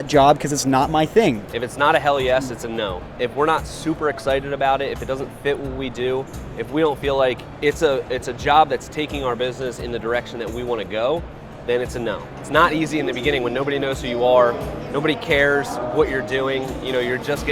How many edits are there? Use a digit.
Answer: 4